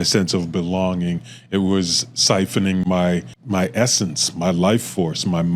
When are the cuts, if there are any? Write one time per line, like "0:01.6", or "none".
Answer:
0:03.3

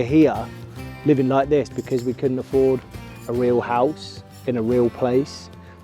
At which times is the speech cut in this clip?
none

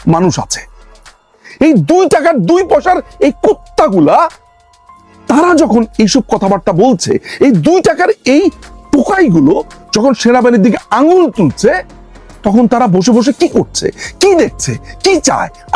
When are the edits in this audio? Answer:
0:01.3

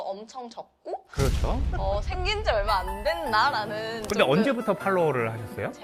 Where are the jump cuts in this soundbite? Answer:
none

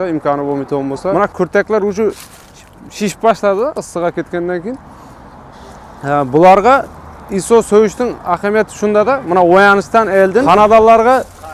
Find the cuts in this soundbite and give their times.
0:01.2
0:10.5

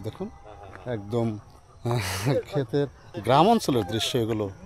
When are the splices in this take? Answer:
0:03.1

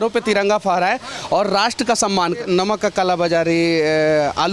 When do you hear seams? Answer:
0:02.4

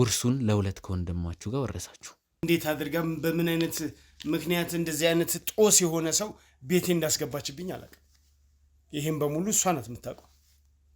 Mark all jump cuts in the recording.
0:02.4

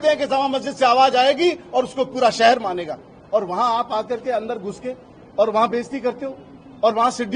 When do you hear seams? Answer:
none

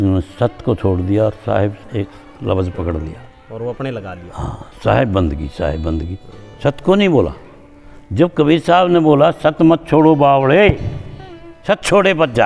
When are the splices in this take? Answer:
none

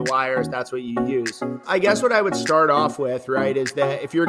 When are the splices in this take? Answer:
0:01.9

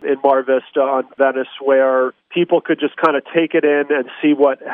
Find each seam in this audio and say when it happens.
none

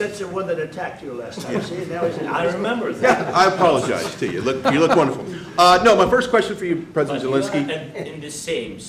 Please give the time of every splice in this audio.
none

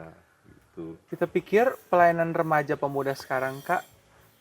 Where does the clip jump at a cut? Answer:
0:01.0

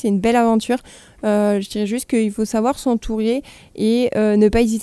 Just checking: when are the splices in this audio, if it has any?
none

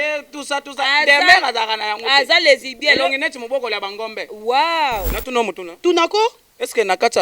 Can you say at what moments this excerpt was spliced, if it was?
0:05.1

